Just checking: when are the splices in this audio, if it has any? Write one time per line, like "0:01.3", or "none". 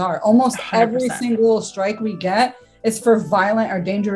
none